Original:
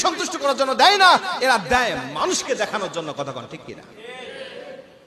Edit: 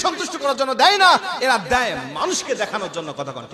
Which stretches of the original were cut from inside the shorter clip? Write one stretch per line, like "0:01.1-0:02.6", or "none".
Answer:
none